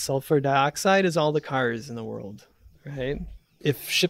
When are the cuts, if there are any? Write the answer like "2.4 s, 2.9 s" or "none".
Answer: none